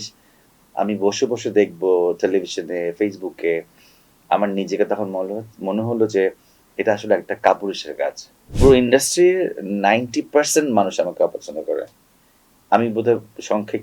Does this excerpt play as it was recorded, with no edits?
no; 1 cut; at 8.5 s

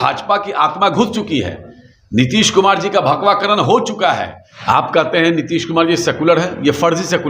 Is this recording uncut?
no; 1 cut; at 4.4 s

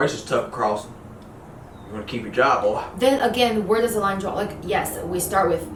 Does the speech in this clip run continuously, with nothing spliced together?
yes; 0 cuts

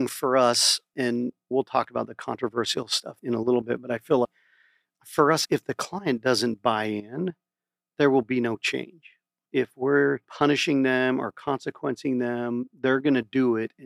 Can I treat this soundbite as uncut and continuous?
no; 4 cuts; at 1.1 s, 3.0 s, 4.3 s, 10.3 s

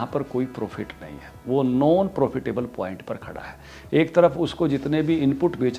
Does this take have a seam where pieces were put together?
no; 0 cuts

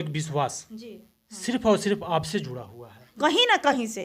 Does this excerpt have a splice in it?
yes; 1 cut; at 3.1 s

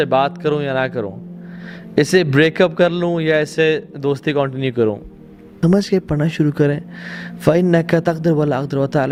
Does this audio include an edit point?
no; 0 cuts

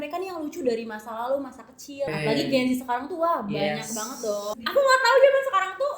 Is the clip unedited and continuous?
no; 2 cuts; at 2.1 s, 4.5 s

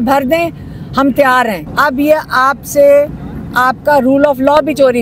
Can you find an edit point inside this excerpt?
yes; 1 cut; at 1.6 s

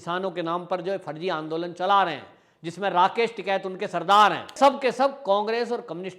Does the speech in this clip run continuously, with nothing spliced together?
no; 1 cut; at 4.5 s

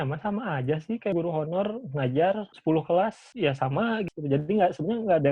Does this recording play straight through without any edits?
no; 4 cuts; at 1.1 s, 2.5 s, 3.2 s, 4.1 s

